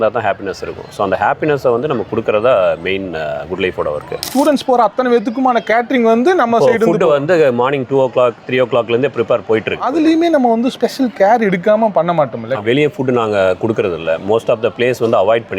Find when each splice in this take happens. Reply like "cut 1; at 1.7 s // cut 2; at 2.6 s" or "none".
cut 1; at 4.3 s // cut 2; at 9.8 s // cut 3; at 12.6 s